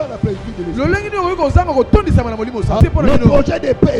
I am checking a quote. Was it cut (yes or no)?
yes